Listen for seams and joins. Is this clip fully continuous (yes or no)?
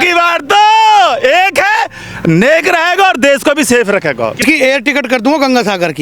no